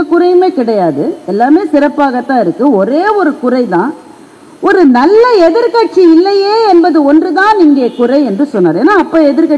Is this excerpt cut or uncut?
uncut